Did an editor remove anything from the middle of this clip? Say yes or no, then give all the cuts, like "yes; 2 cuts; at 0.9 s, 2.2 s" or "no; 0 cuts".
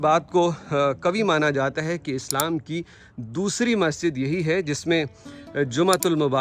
no; 0 cuts